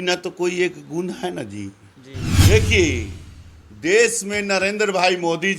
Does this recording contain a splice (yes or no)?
yes